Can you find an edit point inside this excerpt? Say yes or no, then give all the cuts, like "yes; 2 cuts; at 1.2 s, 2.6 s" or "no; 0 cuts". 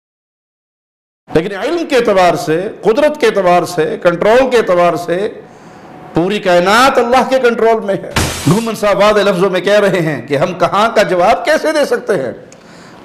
yes; 1 cut; at 8.3 s